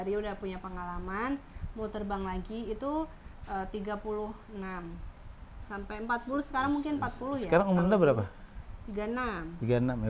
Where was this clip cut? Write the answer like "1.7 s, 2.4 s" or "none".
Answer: none